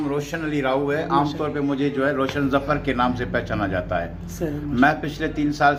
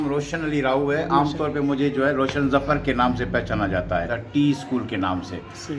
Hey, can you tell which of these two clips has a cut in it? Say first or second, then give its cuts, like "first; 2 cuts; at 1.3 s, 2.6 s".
second; 1 cut; at 4.2 s